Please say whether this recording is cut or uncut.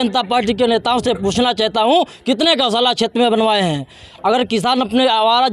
uncut